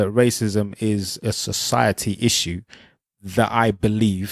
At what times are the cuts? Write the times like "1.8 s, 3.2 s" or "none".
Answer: 1.2 s